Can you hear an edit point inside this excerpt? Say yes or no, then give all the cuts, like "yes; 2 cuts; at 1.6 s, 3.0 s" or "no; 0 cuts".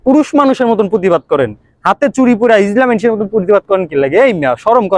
no; 0 cuts